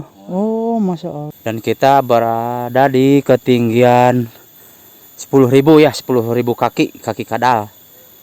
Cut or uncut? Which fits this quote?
cut